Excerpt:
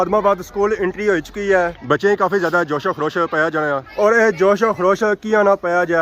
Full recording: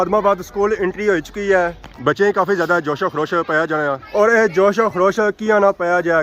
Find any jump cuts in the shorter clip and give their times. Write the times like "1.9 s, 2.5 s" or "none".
1.8 s